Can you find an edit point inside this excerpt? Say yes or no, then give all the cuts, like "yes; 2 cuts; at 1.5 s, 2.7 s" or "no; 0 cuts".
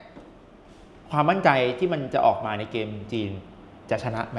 no; 0 cuts